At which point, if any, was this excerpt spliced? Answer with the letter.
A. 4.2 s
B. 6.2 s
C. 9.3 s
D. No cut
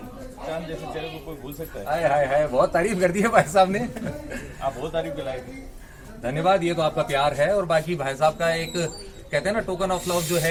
D